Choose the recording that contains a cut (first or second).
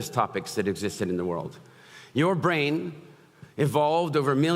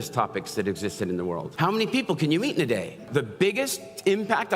second